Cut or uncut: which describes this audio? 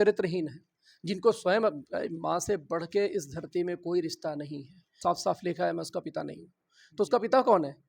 cut